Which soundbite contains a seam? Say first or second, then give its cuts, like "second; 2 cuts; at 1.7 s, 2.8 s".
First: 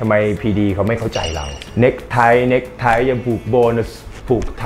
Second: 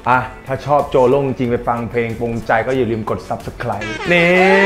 first; 1 cut; at 1.6 s